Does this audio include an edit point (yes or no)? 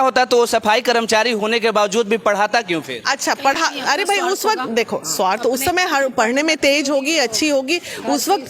no